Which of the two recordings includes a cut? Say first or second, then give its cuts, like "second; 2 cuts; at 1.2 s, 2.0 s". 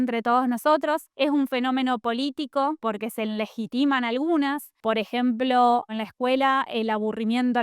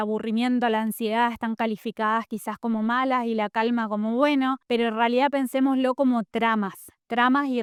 first; 4 cuts; at 1.1 s, 2.8 s, 4.7 s, 6.0 s